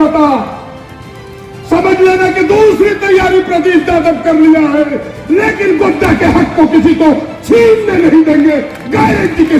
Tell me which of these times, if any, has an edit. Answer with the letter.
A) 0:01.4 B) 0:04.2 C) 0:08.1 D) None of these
D